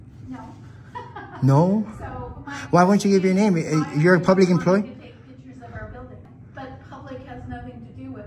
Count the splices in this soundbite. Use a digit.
1